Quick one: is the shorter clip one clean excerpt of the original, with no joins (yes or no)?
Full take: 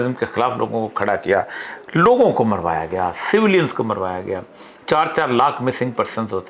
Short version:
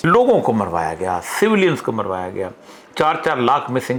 yes